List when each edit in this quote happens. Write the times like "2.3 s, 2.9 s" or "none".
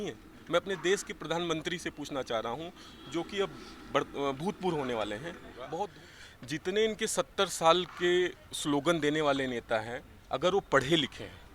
6.0 s

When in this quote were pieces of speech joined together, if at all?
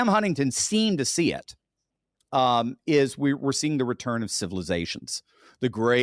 none

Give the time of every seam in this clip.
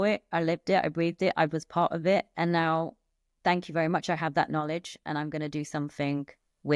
none

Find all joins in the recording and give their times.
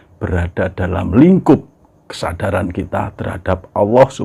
none

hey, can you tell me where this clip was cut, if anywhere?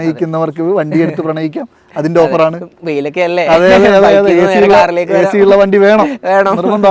none

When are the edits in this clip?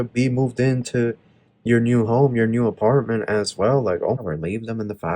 4.2 s

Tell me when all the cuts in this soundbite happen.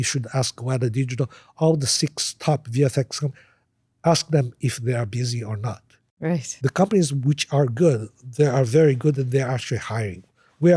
6.5 s

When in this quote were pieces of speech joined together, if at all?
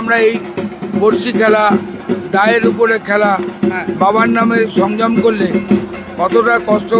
none

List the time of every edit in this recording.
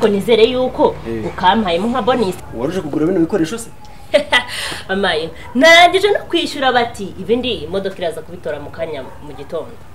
2.4 s

